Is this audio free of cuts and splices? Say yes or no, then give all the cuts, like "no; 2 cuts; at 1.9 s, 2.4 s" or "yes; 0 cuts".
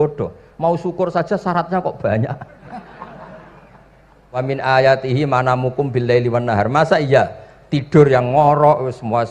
no; 1 cut; at 4.4 s